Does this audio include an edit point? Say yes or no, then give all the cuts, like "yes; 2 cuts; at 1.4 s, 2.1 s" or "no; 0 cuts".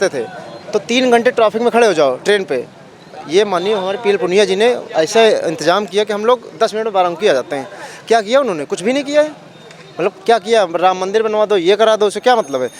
no; 0 cuts